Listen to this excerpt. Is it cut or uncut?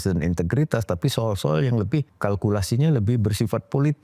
cut